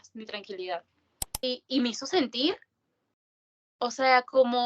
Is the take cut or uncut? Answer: cut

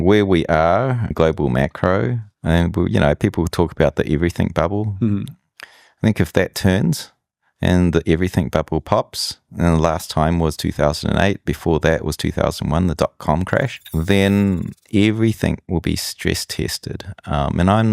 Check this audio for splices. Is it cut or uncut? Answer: cut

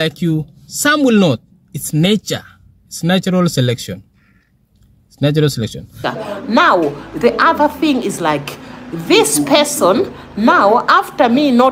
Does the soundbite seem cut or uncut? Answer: cut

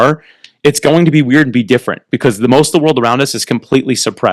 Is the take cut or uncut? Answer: uncut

